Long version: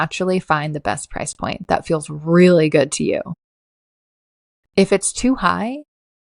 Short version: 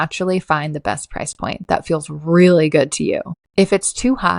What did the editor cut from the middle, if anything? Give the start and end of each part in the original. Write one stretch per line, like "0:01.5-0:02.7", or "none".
0:03.4-0:04.6